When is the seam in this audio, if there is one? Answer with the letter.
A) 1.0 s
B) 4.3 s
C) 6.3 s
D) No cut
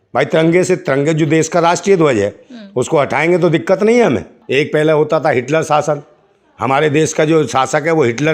B